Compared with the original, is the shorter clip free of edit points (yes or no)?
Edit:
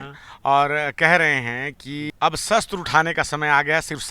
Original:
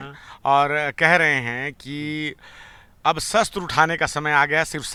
no